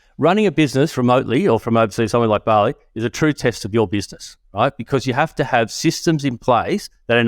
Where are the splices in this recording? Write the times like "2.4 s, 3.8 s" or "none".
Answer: 1.6 s